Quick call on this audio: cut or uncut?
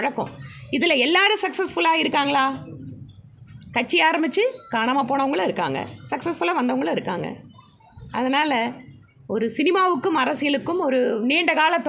uncut